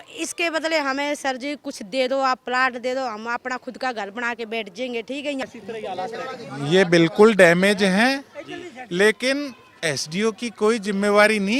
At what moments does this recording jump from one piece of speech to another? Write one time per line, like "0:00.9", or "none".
0:05.4